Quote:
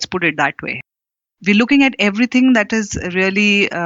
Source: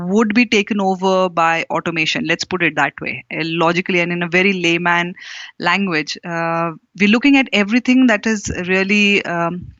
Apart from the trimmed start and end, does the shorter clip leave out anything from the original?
yes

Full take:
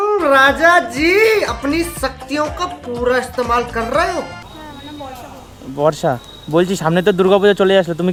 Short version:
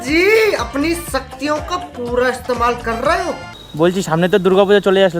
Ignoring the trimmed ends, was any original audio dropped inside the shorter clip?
yes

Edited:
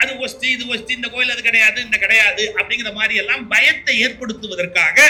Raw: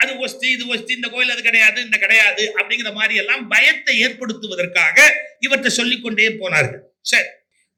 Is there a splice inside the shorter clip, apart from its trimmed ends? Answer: no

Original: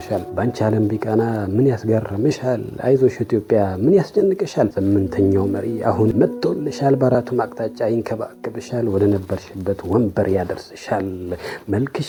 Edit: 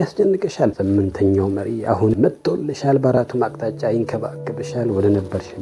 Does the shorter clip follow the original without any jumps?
yes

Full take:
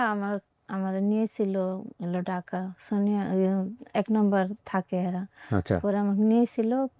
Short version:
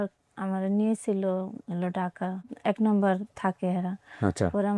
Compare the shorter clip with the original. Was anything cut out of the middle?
yes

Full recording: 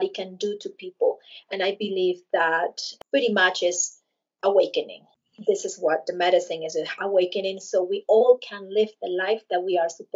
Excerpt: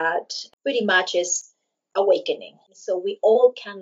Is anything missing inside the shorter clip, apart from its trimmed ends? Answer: yes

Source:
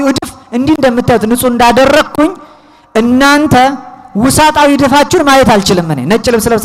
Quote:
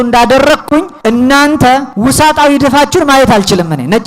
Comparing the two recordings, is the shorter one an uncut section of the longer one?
no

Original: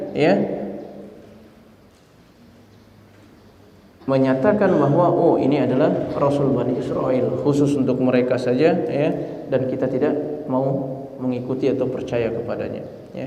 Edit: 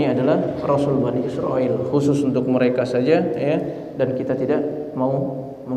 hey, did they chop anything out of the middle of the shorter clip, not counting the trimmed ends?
no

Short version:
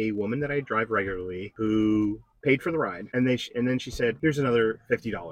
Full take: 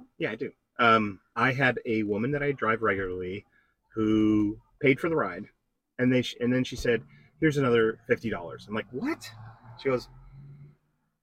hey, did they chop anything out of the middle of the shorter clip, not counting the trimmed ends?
yes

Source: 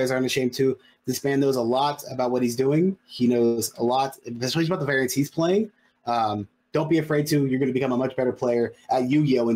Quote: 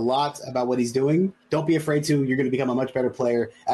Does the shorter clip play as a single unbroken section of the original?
no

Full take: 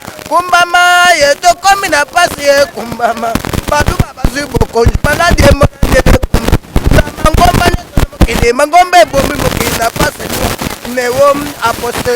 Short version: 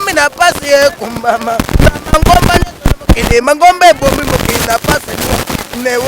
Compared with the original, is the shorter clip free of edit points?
no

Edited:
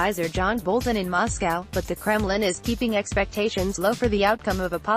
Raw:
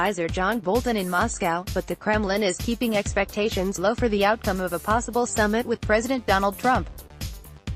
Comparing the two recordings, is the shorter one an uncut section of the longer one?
yes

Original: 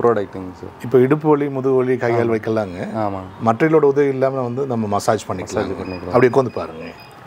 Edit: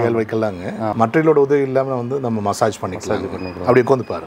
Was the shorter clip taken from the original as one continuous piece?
no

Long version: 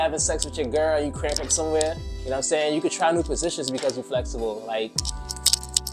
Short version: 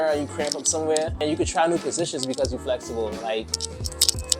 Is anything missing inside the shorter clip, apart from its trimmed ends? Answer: yes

